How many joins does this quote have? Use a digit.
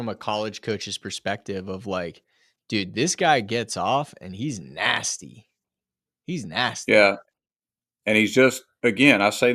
0